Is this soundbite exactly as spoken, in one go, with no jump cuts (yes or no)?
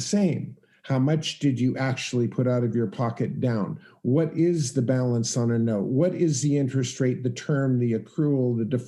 yes